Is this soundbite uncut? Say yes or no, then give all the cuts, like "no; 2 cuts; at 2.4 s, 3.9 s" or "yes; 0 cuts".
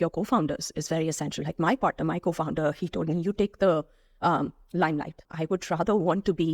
no; 1 cut; at 5.3 s